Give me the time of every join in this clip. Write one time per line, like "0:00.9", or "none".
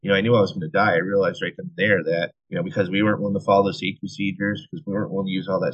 0:02.4